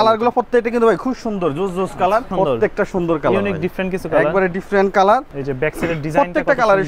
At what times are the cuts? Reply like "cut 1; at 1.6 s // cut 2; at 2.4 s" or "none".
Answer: cut 1; at 2.3 s // cut 2; at 5.3 s

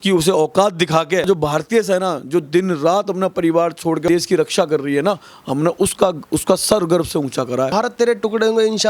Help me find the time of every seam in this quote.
cut 1; at 1.2 s // cut 2; at 4.1 s // cut 3; at 7.7 s

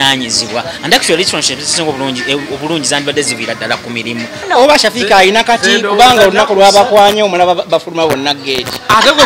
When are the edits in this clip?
cut 1; at 4.5 s

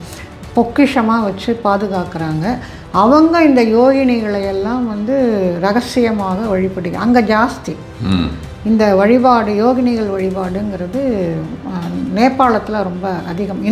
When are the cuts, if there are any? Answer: none

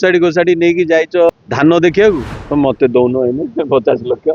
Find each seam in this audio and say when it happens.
cut 1; at 1.3 s // cut 2; at 2.3 s

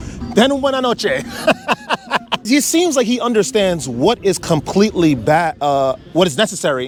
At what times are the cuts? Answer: none

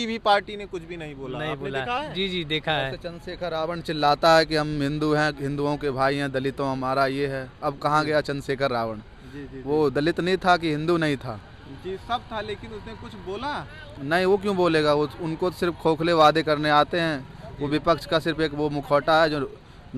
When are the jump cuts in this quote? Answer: none

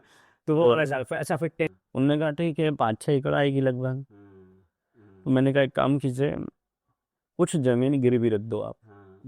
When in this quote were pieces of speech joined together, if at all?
cut 1; at 1.7 s

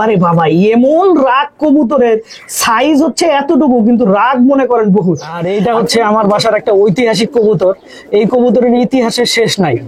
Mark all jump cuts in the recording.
cut 1; at 5.4 s

